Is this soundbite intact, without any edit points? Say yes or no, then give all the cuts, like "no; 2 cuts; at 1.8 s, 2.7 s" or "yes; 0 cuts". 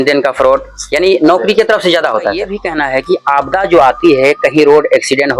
no; 1 cut; at 2.6 s